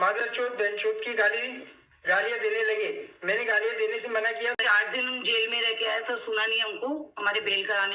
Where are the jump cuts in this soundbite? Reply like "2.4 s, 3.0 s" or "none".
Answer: 4.6 s